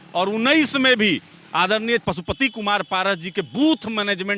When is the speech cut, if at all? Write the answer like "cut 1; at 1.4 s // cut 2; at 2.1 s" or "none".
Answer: cut 1; at 2.0 s